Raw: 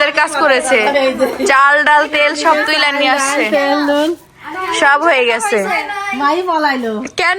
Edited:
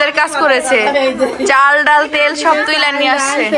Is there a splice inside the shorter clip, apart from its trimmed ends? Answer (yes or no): no